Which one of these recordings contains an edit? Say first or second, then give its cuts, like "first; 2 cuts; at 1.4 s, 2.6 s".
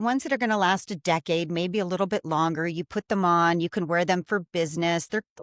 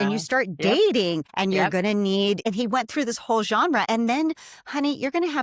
second; 3 cuts; at 1.3 s, 2.4 s, 3.8 s